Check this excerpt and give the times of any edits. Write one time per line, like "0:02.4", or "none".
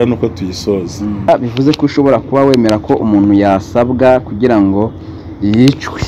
0:01.3